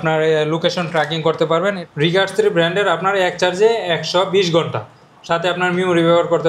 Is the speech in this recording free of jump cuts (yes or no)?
no